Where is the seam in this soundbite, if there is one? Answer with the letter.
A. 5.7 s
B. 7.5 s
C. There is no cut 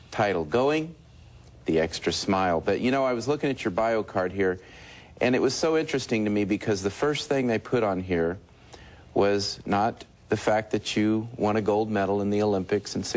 A